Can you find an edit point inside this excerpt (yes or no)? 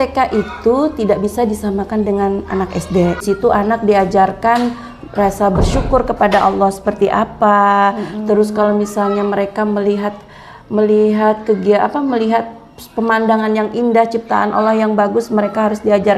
yes